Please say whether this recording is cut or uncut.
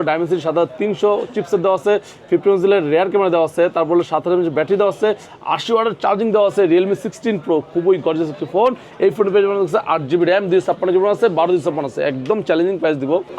uncut